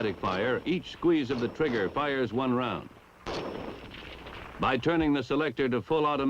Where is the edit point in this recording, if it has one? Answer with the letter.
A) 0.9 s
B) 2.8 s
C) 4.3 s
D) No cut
C